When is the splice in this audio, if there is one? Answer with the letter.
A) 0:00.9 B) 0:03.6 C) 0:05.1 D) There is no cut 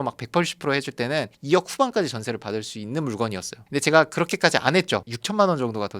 C